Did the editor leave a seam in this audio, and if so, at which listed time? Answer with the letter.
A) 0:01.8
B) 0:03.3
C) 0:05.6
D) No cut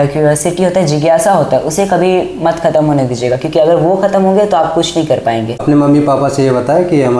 C